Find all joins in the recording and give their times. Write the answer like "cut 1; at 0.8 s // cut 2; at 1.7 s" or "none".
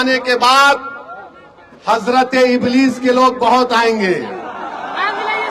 none